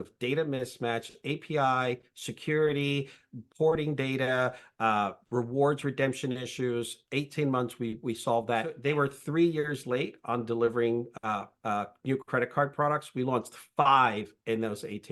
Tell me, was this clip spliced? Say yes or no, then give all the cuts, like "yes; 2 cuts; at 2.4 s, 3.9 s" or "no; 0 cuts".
yes; 1 cut; at 8.8 s